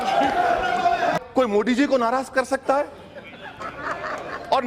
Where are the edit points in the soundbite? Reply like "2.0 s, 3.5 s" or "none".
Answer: 1.1 s